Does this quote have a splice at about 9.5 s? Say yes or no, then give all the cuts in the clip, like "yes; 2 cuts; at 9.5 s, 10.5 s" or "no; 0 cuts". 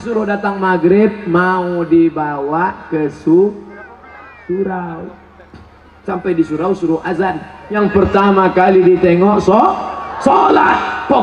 no; 1 cut; at 7.8 s